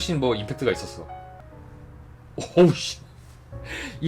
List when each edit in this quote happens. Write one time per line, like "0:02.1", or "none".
0:01.6